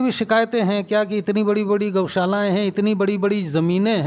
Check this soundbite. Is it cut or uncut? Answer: uncut